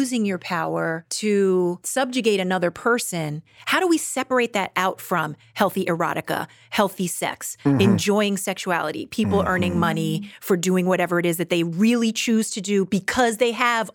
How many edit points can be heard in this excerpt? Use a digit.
2